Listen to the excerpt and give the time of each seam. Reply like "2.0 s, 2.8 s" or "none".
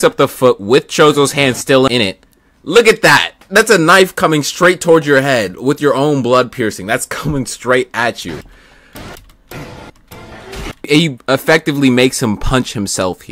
1.9 s, 10.9 s